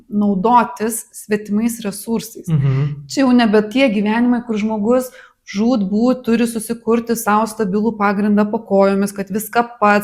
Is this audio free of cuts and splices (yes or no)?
yes